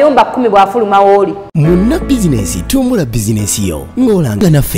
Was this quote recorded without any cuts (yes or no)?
no